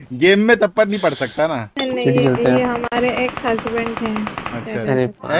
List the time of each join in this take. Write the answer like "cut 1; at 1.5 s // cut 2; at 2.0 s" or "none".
cut 1; at 1.7 s